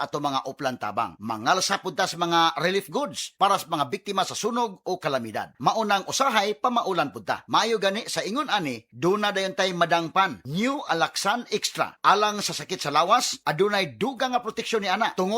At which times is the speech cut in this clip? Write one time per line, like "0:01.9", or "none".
0:11.6